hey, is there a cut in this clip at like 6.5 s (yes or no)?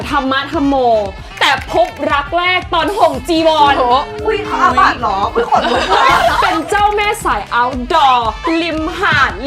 yes